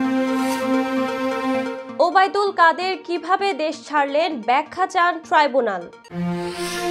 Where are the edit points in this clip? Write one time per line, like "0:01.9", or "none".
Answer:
none